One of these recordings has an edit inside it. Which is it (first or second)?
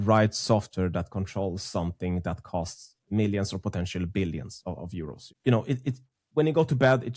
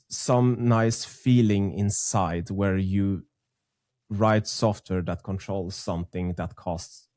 first